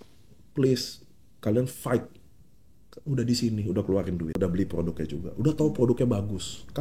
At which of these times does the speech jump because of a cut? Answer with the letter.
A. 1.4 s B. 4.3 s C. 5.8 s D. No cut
B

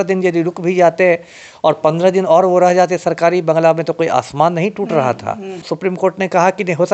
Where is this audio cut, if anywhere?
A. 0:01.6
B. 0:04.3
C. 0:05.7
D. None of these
C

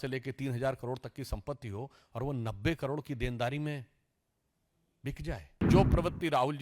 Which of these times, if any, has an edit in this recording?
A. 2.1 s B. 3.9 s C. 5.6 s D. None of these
C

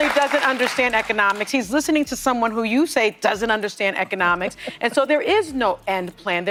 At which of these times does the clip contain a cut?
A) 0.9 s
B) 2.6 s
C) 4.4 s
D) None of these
D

